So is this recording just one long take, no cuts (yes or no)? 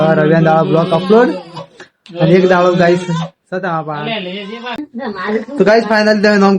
no